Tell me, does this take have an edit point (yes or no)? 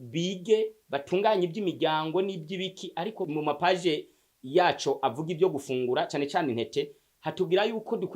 yes